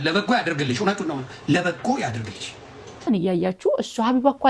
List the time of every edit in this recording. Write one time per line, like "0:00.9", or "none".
0:03.1